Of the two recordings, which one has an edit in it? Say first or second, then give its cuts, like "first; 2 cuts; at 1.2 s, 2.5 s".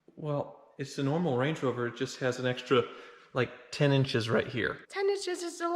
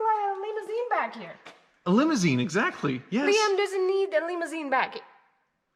first; 1 cut; at 4.8 s